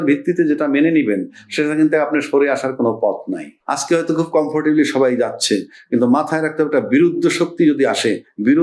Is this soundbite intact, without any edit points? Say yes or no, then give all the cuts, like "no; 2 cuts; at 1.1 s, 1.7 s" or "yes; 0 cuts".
no; 1 cut; at 3.6 s